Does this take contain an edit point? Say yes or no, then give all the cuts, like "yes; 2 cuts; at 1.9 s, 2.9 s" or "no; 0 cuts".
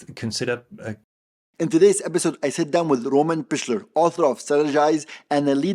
yes; 1 cut; at 1.1 s